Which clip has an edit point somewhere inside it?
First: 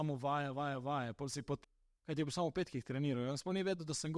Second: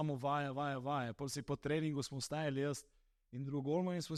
first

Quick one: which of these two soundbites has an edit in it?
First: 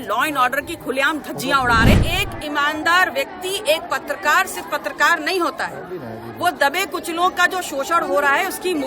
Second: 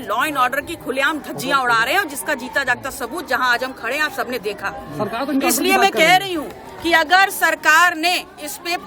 first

